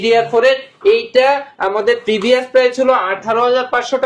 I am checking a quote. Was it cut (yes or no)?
no